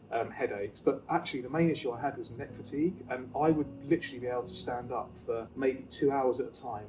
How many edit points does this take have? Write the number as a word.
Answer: one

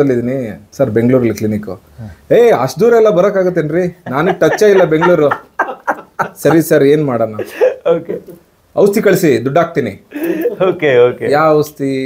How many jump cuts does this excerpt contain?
zero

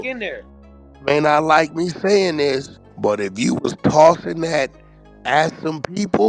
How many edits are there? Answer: one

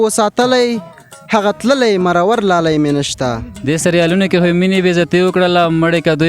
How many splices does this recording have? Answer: one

